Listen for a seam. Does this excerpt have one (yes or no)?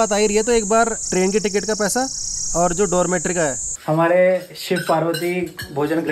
yes